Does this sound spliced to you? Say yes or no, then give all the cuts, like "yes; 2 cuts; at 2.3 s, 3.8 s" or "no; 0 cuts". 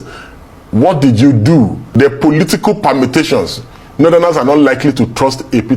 yes; 1 cut; at 1.9 s